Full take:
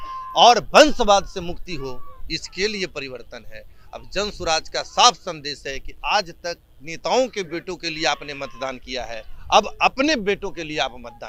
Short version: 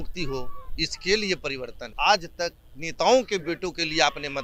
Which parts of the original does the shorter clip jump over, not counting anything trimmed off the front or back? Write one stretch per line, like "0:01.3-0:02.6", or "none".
0:03.3-0:05.9

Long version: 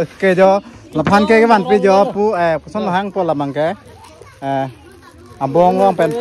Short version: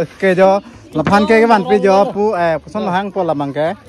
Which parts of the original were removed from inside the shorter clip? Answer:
none

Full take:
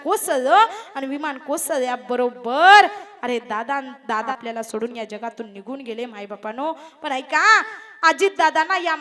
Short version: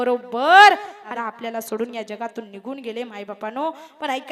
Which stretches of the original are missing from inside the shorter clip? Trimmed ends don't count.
0:03.3-0:04.2

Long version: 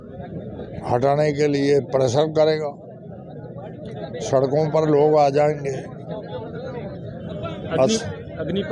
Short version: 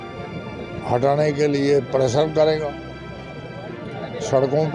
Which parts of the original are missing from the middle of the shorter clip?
none

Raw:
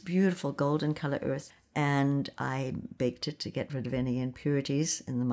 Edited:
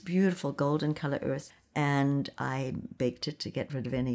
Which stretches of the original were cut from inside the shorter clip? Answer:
none

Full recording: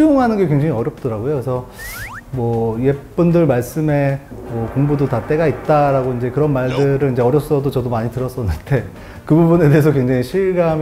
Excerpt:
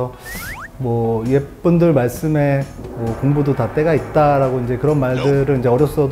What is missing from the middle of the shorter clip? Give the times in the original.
none

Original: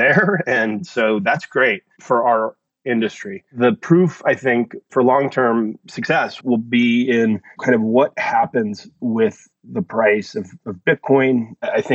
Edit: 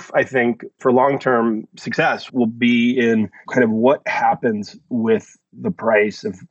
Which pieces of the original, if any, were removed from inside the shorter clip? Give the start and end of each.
none

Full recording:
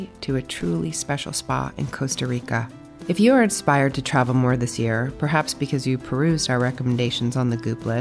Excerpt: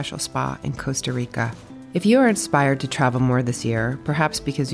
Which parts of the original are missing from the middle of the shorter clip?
none

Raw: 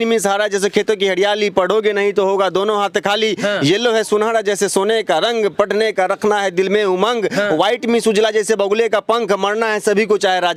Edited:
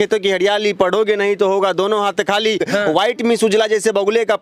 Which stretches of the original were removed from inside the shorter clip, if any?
0:03.4-0:07.3

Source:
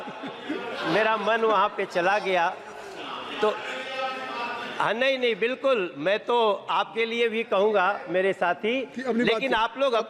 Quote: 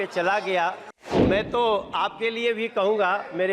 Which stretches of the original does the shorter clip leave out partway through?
0:03.0-0:05.9

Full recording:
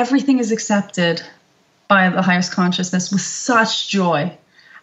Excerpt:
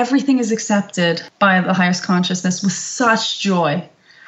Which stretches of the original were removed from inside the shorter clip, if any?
0:01.3-0:01.8

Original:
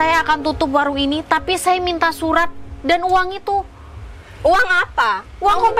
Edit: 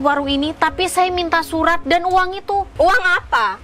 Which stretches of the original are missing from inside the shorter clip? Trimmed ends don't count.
0:02.5-0:02.8
0:03.7-0:04.3

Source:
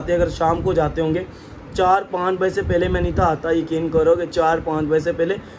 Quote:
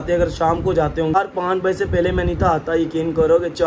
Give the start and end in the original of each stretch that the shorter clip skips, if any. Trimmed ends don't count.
0:01.1-0:01.9

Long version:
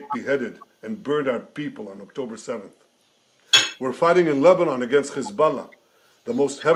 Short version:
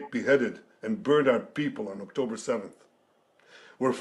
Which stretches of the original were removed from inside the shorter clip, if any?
none

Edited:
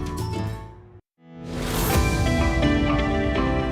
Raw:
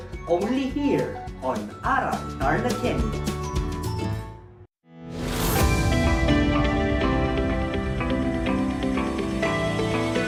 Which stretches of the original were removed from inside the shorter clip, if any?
none

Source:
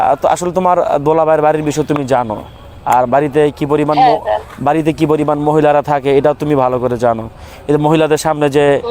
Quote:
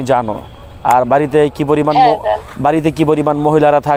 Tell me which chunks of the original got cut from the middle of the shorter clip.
none

